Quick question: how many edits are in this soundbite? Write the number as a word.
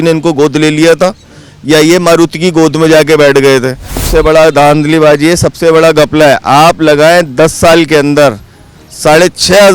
one